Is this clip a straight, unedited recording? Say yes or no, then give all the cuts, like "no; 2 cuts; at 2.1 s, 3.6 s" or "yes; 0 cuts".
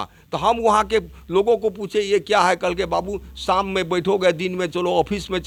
yes; 0 cuts